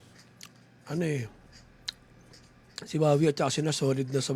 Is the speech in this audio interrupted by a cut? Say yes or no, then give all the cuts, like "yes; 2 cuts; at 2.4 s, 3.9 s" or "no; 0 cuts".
no; 0 cuts